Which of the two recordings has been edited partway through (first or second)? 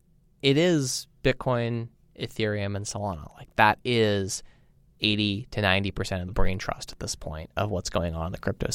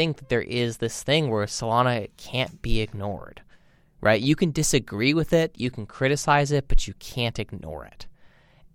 first